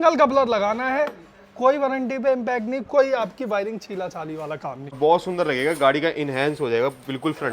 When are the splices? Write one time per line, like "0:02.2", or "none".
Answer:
0:05.0